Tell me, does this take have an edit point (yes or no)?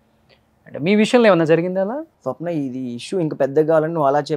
yes